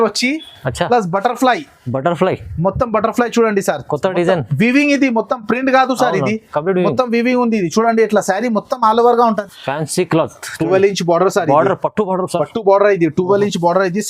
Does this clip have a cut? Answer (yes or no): yes